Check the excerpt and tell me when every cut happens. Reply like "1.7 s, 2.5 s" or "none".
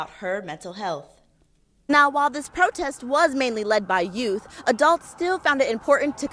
1.9 s